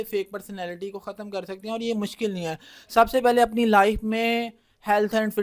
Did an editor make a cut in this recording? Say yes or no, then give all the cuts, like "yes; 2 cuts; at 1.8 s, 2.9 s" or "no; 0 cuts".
no; 0 cuts